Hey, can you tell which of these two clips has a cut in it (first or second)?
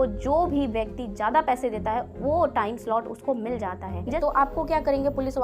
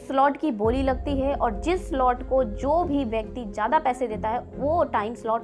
first